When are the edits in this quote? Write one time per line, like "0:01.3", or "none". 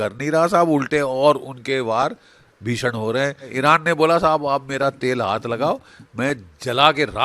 0:03.5